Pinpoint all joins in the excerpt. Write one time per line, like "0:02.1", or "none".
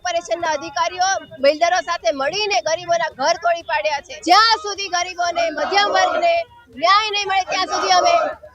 0:04.2